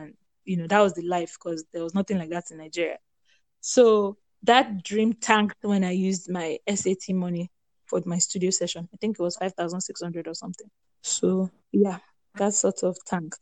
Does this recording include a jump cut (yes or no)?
no